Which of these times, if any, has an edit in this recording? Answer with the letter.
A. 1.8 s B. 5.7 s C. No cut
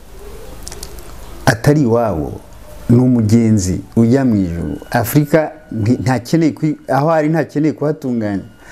C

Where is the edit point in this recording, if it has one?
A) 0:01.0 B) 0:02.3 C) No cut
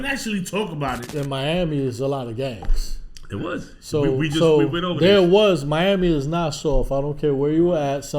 A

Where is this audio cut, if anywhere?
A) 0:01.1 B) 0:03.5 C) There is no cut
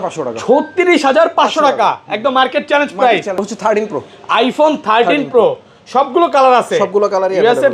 B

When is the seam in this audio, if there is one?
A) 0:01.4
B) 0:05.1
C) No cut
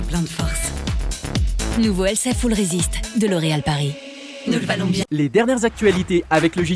B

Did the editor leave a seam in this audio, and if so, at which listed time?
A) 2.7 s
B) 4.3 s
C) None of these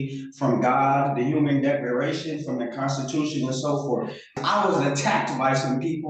B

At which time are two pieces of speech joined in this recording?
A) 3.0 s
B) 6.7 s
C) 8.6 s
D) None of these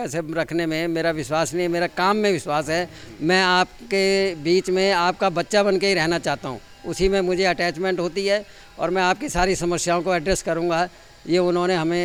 D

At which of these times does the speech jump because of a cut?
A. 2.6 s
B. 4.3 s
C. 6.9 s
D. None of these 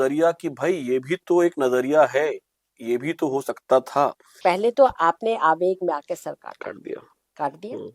B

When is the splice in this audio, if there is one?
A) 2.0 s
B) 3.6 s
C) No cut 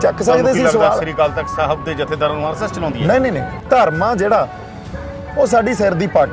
B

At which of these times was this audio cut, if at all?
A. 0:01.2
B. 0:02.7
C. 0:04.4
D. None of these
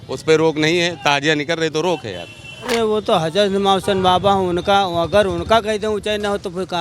B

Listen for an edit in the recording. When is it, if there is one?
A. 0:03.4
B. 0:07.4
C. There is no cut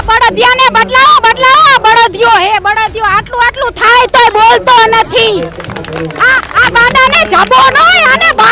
C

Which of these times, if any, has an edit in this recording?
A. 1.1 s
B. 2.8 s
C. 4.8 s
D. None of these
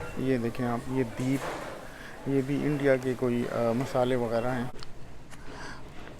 C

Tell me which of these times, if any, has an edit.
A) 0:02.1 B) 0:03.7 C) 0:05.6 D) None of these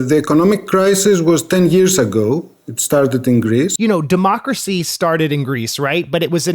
B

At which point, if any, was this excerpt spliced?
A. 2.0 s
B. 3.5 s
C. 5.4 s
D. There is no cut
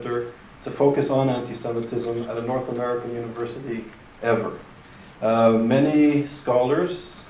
C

